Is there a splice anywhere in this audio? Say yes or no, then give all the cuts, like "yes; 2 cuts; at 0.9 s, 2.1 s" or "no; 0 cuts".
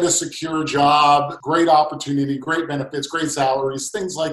yes; 1 cut; at 1.4 s